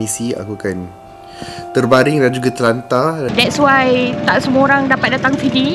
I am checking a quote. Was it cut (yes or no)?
yes